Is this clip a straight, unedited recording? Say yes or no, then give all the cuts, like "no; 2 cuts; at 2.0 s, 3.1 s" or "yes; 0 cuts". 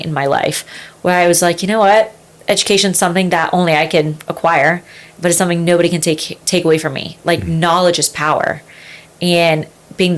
yes; 0 cuts